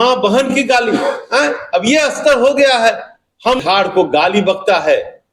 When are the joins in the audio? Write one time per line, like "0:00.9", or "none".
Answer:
0:03.6